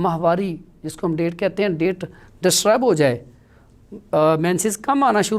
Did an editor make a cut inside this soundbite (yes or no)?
no